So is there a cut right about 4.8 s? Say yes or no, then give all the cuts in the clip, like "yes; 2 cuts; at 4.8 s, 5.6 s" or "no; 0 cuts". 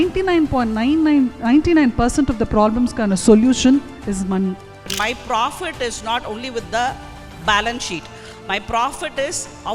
yes; 1 cut; at 4.8 s